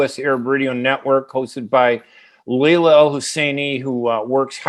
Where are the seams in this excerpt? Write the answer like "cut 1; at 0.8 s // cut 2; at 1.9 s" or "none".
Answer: none